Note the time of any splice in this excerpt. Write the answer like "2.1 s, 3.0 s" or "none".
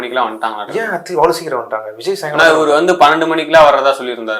none